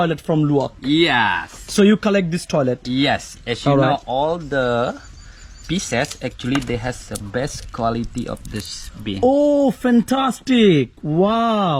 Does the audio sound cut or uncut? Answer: uncut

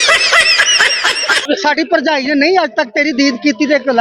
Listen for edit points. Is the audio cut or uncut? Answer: cut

